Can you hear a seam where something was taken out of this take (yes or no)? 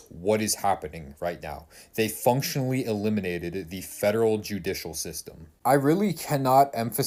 no